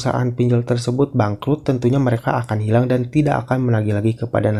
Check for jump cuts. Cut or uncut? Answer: uncut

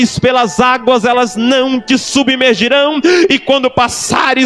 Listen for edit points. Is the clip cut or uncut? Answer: uncut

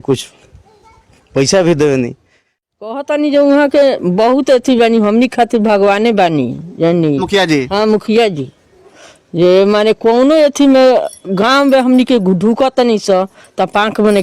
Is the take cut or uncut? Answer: cut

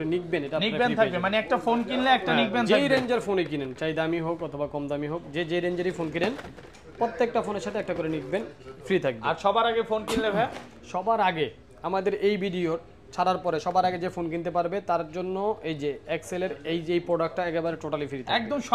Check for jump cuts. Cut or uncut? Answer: uncut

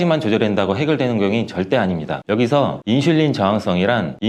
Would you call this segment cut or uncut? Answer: uncut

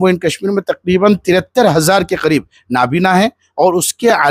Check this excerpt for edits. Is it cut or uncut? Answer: uncut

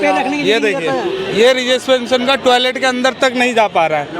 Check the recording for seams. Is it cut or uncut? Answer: uncut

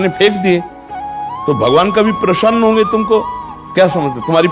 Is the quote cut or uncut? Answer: uncut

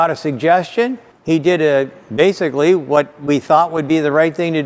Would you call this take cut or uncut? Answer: uncut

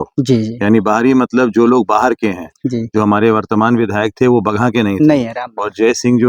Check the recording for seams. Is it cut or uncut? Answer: uncut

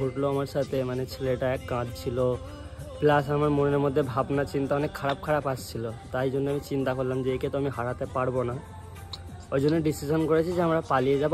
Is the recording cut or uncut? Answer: uncut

